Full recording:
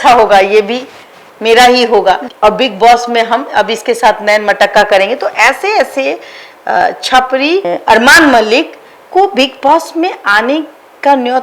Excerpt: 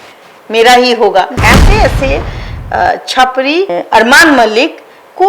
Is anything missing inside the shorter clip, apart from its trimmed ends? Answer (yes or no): yes